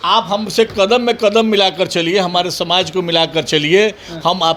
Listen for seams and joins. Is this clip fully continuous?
yes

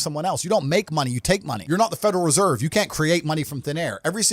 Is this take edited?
yes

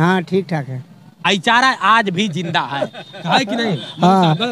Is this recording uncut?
no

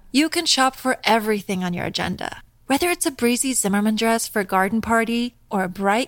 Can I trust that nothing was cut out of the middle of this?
yes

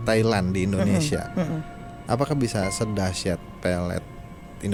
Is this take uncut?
yes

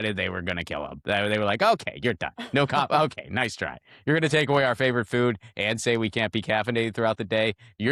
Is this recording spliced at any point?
no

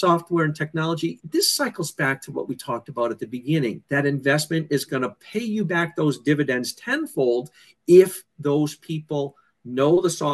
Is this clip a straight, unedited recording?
no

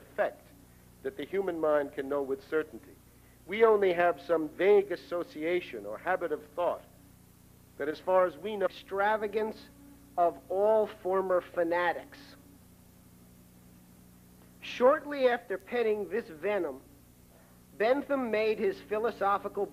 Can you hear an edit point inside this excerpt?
no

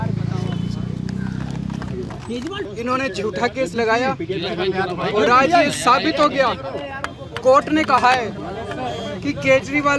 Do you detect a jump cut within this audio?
yes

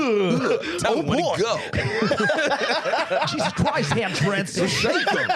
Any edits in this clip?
no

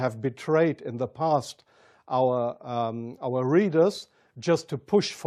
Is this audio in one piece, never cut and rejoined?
yes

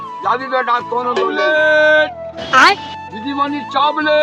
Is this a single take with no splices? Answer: no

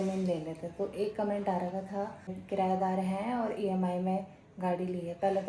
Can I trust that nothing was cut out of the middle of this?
no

